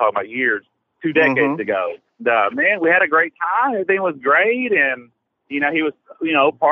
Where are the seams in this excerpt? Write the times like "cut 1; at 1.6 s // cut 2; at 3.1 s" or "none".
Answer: cut 1; at 2.1 s